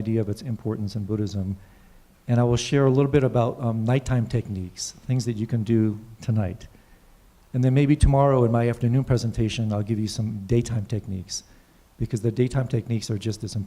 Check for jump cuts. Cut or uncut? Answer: cut